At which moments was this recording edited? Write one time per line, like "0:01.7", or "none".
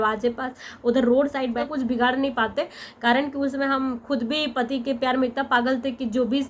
0:01.6